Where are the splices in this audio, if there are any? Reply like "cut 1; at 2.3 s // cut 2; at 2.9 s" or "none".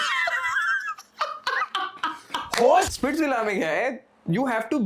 cut 1; at 2.9 s

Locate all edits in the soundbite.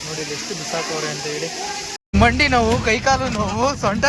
cut 1; at 2.0 s

